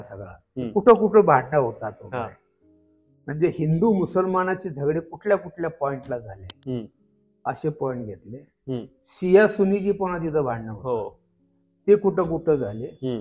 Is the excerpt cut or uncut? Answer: uncut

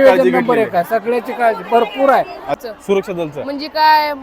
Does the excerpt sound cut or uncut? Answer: cut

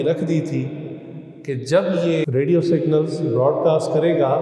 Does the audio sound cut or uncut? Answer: cut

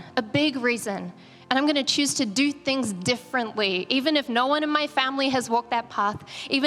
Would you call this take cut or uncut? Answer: uncut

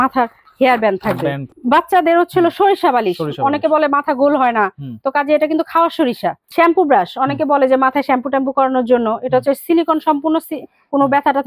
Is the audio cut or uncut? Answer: cut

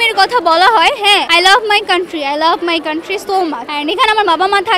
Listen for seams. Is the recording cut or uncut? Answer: cut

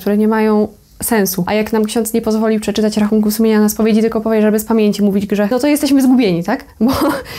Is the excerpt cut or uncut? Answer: cut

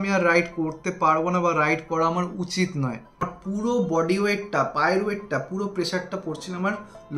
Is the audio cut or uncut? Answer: cut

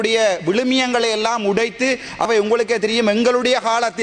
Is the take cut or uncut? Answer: cut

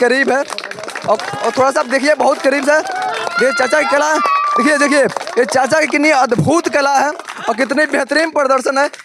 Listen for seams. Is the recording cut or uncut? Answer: uncut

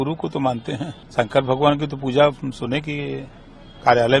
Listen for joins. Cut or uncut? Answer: cut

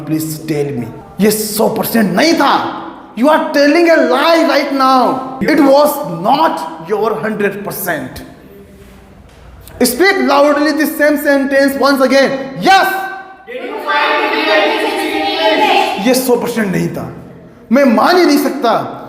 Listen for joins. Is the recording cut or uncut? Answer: cut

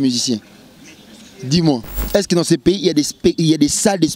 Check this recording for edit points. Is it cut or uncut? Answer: cut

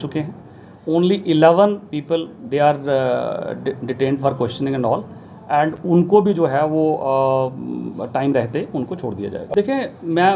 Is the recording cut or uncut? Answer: uncut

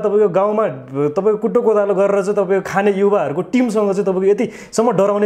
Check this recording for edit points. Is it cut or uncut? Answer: uncut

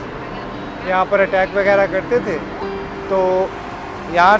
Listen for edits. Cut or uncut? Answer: uncut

